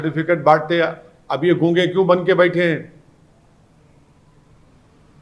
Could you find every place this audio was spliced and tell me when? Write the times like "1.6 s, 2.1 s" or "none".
none